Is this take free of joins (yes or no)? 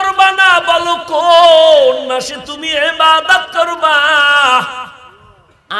yes